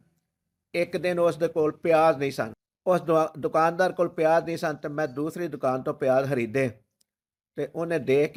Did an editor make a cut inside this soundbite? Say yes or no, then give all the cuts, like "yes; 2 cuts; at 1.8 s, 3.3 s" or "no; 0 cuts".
no; 0 cuts